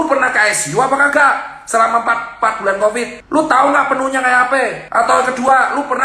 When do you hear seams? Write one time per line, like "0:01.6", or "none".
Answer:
0:03.2
0:04.8